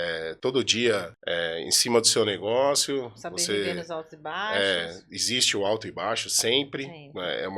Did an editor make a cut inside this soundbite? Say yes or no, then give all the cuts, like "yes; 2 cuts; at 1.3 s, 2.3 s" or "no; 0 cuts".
yes; 1 cut; at 1.1 s